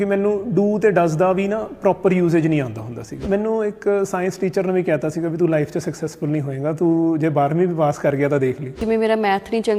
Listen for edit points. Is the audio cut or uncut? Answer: cut